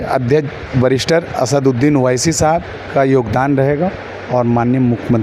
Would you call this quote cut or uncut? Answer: uncut